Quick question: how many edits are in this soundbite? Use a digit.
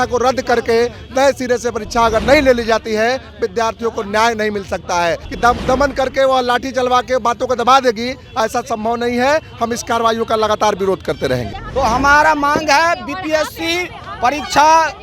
2